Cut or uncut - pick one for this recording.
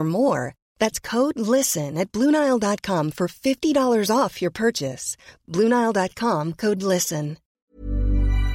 cut